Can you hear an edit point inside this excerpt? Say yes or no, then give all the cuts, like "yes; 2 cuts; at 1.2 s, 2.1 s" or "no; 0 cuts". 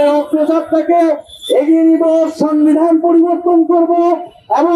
no; 0 cuts